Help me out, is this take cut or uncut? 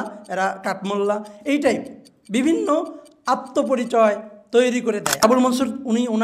cut